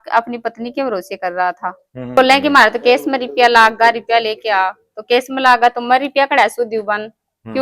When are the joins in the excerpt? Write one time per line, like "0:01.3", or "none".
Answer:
0:02.0